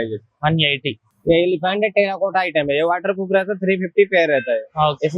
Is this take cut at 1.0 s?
yes; 1 cut; at 1.0 s

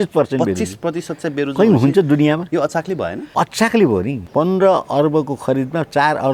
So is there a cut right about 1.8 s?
no; 2 cuts; at 3.2 s, 4.2 s

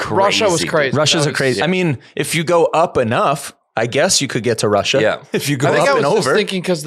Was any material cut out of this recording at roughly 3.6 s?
no; 0 cuts

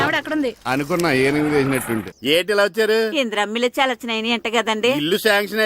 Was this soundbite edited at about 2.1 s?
yes; 1 cut; at 2.1 s

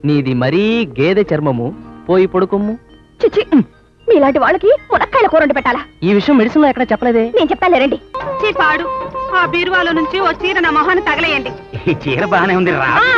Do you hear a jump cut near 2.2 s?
no; 1 cut; at 8.2 s

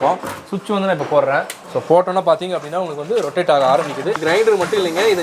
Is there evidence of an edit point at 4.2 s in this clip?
yes; 1 cut; at 4.2 s

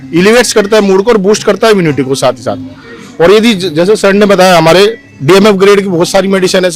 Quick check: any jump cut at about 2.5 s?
no; 0 cuts

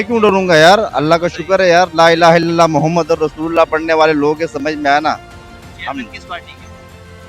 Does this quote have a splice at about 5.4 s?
no; 0 cuts

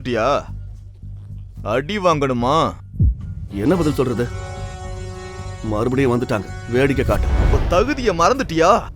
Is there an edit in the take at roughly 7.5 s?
yes; 1 cut; at 7.5 s

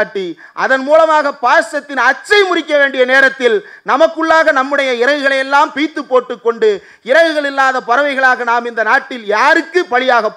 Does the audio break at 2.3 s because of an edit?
no; 0 cuts

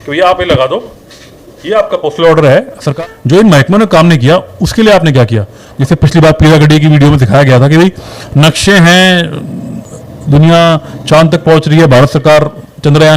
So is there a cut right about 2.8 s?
yes; 2 cuts; at 2.8 s, 5.7 s

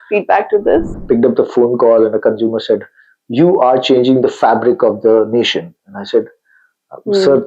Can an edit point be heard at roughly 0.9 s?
yes; 1 cut; at 0.9 s

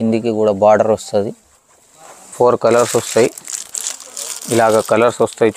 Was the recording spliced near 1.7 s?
yes; 1 cut; at 1.7 s

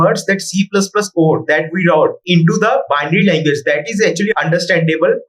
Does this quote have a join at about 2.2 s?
yes; 1 cut; at 2.2 s

